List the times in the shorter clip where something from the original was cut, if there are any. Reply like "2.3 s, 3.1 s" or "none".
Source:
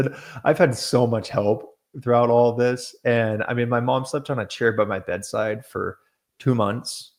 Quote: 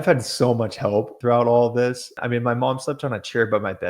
1.1 s, 2.2 s